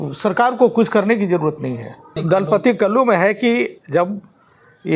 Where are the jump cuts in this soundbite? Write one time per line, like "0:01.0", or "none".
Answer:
0:02.1